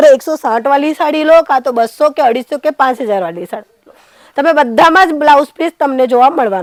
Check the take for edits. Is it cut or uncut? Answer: uncut